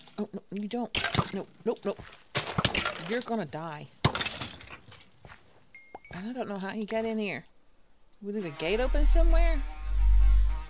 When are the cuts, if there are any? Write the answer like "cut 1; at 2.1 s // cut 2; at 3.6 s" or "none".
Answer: cut 1; at 8.9 s